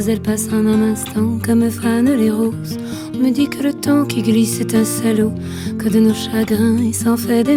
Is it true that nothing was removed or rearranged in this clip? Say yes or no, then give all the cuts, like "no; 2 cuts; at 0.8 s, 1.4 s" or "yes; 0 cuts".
yes; 0 cuts